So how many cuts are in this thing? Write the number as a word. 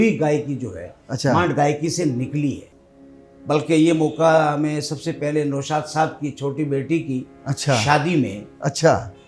one